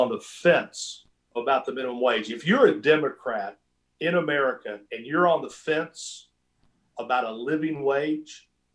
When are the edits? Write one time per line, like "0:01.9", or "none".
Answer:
0:01.3